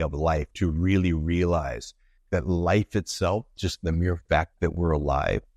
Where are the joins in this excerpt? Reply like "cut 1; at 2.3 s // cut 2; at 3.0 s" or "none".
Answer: none